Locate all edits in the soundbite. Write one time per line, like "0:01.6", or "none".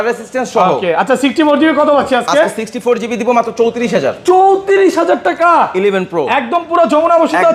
none